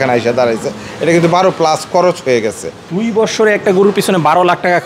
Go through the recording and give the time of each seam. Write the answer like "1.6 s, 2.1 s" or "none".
2.8 s